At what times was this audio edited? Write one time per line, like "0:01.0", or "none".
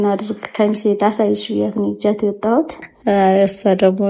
0:02.8